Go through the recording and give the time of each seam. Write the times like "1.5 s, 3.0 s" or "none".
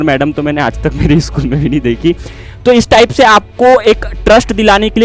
none